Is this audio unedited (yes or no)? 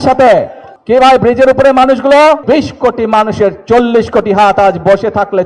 no